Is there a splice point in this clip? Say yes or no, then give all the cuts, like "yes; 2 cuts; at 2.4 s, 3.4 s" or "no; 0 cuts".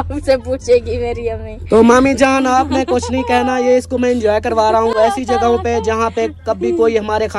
no; 0 cuts